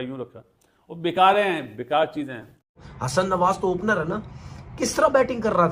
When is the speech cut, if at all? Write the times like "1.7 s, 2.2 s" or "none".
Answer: 2.7 s